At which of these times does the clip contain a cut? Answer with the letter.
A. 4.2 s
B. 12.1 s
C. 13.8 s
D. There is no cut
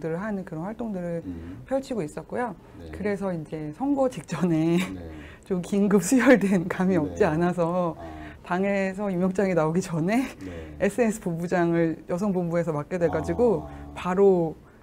B